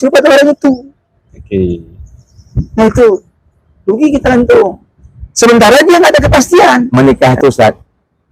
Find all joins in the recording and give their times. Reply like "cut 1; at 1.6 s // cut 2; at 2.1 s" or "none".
cut 1; at 6.9 s